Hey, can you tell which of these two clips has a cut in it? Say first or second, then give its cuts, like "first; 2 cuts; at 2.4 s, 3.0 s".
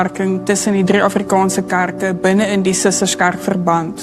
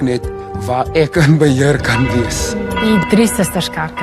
second; 1 cut; at 2.7 s